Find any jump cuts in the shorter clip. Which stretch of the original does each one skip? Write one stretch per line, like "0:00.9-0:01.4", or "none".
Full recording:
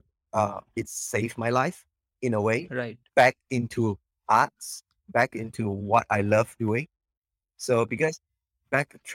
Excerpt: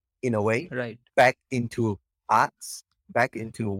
none